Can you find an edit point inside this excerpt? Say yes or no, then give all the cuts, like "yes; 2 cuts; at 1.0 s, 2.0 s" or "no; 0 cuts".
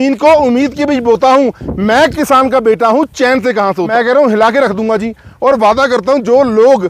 yes; 1 cut; at 3.9 s